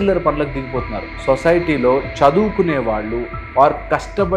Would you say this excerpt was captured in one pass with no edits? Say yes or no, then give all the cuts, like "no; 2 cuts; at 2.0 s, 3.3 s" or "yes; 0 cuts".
no; 1 cut; at 1.1 s